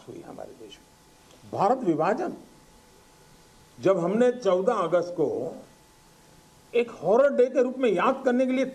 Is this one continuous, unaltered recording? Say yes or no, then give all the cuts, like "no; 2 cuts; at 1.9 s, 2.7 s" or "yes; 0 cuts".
yes; 0 cuts